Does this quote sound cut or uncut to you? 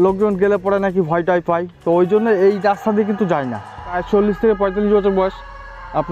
cut